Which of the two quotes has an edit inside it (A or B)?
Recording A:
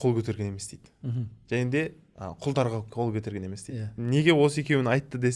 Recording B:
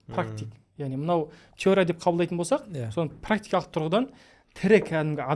A